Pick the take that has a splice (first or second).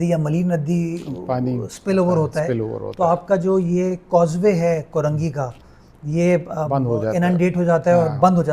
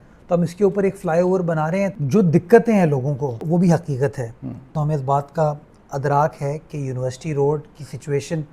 second